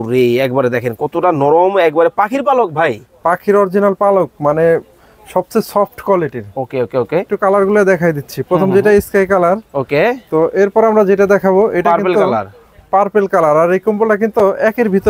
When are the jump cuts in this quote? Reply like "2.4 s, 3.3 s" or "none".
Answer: 7.3 s